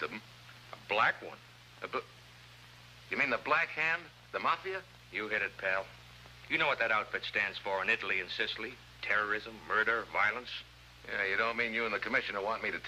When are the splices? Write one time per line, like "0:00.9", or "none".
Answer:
0:11.6

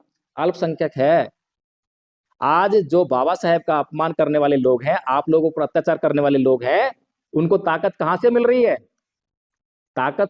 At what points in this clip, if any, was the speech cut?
none

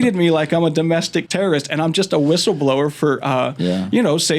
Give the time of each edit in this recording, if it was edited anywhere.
0:01.3

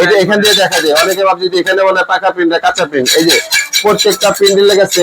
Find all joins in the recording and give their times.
none

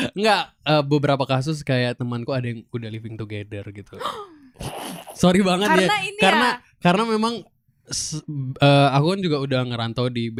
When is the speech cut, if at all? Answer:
none

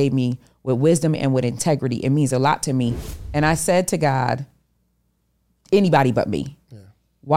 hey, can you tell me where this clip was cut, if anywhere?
0:03.1

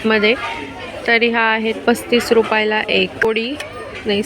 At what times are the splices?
0:03.2

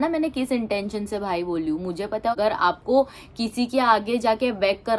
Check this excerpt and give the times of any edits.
0:02.4

